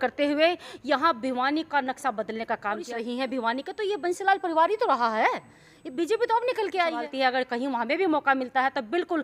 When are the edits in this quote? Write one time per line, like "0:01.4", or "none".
0:02.9
0:07.1